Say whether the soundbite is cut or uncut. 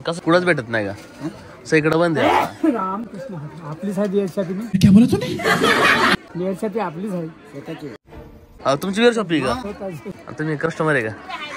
cut